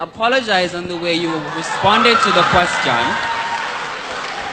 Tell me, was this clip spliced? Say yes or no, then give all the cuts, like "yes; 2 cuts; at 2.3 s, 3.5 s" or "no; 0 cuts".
no; 0 cuts